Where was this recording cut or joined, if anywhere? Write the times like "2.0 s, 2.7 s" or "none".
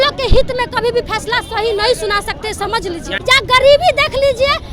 3.1 s